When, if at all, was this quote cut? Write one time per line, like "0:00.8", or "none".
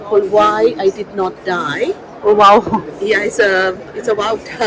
none